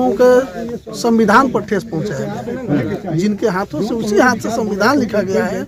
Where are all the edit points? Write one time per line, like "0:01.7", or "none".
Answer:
none